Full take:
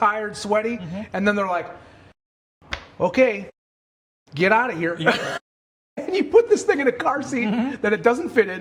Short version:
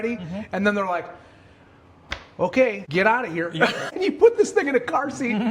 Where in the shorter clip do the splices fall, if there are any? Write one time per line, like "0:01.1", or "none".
0:02.8
0:03.8